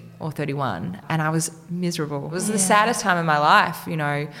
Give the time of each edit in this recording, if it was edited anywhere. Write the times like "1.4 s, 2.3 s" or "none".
2.4 s